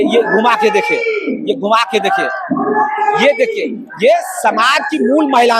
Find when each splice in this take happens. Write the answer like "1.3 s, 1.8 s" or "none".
none